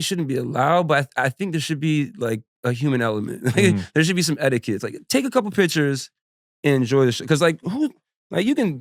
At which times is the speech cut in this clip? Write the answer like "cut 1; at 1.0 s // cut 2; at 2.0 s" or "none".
none